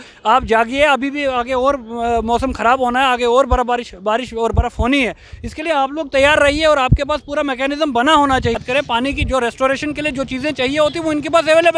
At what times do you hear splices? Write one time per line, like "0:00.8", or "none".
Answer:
0:08.6